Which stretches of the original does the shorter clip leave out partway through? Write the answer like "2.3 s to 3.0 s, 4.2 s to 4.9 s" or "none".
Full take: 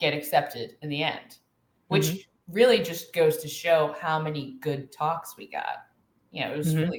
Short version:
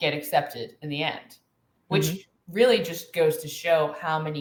none